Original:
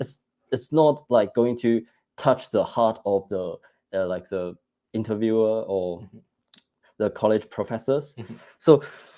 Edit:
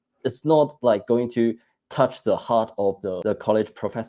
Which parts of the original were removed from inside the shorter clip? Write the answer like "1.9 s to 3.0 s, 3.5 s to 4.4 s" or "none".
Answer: 3.5 s to 6.9 s